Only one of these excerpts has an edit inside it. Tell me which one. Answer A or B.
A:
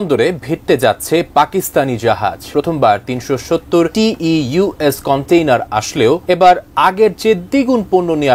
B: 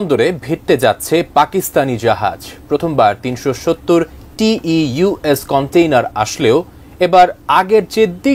A